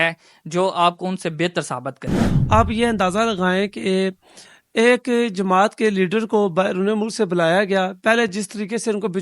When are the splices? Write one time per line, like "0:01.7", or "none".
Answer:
0:02.3